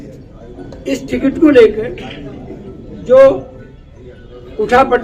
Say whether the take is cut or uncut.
uncut